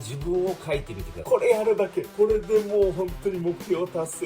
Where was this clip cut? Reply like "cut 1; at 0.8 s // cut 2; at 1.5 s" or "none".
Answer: cut 1; at 1.1 s